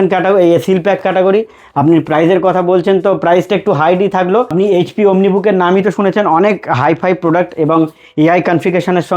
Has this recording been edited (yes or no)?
yes